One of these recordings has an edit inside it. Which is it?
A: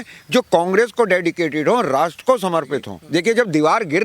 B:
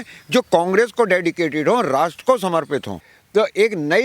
A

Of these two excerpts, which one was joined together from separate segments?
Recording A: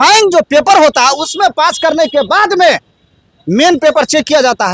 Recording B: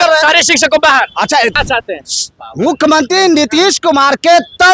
B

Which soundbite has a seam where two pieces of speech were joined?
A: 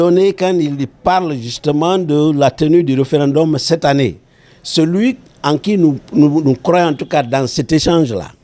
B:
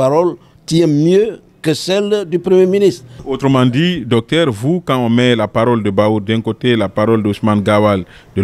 B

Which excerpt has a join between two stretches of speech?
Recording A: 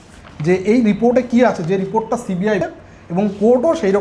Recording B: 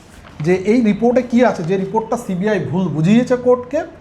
A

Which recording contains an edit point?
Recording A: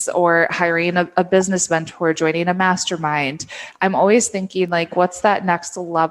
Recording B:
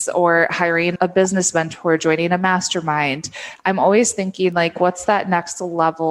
B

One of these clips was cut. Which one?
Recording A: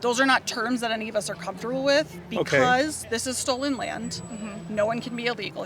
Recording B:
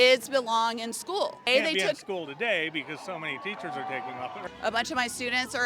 B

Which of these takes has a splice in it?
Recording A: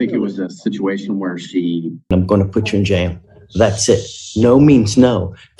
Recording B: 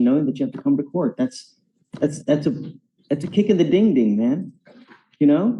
A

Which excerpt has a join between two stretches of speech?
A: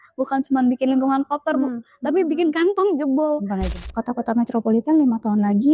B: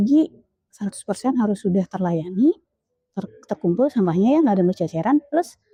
A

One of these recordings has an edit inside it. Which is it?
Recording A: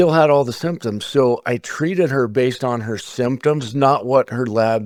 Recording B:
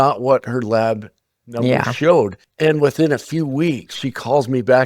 B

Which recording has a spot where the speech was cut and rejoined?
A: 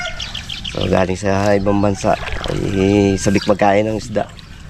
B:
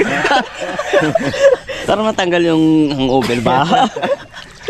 B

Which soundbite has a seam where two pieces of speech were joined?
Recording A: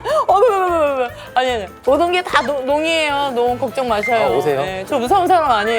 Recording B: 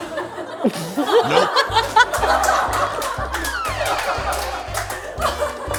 A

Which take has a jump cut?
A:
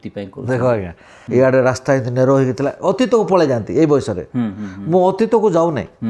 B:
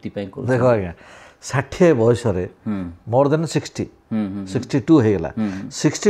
A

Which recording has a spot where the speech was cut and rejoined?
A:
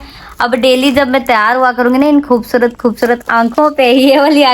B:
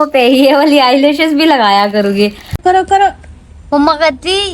B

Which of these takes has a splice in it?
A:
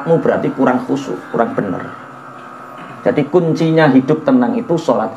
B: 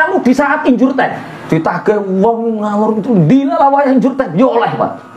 B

